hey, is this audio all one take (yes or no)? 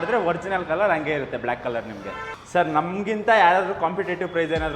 no